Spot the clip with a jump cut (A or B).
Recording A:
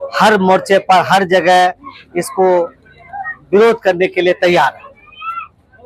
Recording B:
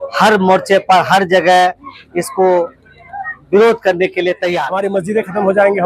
B